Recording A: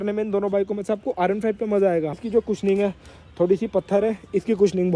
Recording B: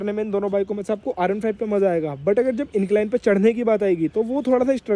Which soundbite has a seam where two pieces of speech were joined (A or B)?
A